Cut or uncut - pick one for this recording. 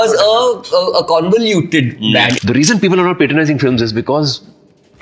cut